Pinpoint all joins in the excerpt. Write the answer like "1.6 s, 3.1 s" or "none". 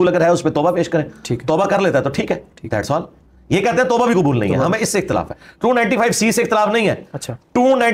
none